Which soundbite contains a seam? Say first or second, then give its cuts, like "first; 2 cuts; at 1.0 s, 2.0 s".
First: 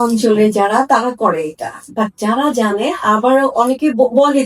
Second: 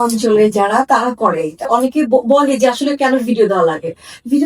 second; 1 cut; at 1.7 s